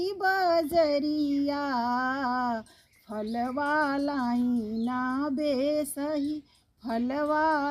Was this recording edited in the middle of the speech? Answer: no; 0 cuts

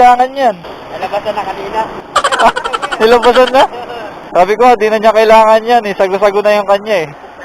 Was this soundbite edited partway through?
yes; 1 cut; at 2.1 s

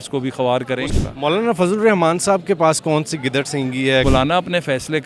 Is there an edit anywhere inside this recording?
yes; 2 cuts; at 0.9 s, 4.0 s

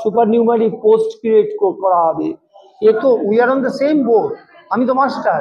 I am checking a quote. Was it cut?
yes; 1 cut; at 3.0 s

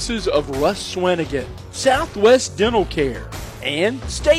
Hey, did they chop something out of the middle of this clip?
no; 0 cuts

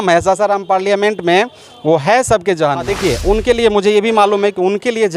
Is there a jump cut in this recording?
yes; 1 cut; at 2.9 s

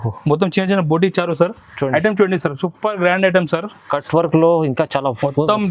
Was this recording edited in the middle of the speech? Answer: no; 0 cuts

